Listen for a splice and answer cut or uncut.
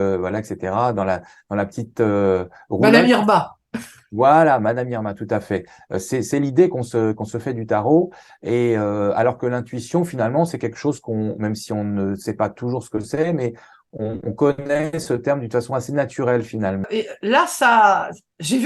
cut